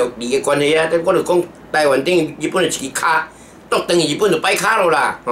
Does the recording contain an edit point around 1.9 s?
no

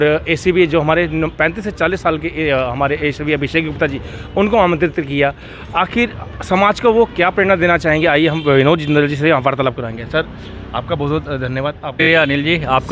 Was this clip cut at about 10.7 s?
no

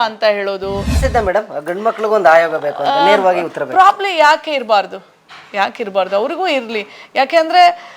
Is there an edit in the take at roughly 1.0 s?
yes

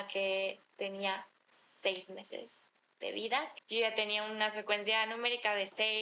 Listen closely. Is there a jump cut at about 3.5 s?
yes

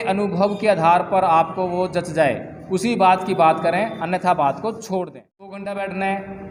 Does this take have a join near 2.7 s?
no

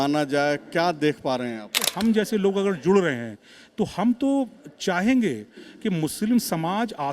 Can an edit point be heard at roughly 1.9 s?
yes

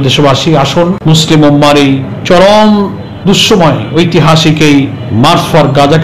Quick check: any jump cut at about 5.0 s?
yes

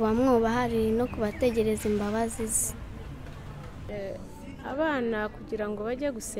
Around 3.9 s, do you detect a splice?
yes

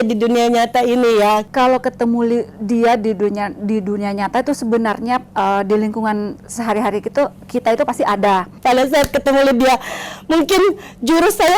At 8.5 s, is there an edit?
yes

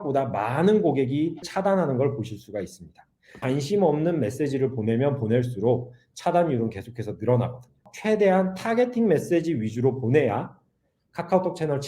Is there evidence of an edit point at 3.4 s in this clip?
yes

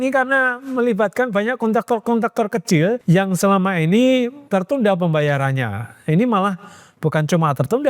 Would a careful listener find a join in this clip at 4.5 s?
yes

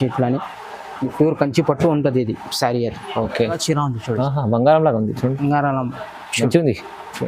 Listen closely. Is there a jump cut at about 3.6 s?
yes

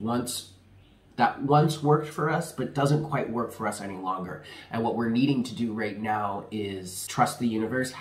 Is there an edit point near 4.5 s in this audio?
no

